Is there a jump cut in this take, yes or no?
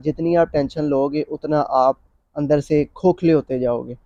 no